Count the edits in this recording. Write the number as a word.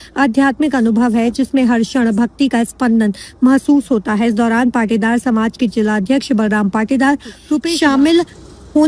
one